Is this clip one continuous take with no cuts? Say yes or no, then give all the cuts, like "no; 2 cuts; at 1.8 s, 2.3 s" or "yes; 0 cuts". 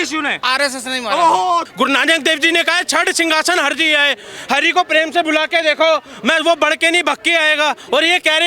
no; 1 cut; at 1.7 s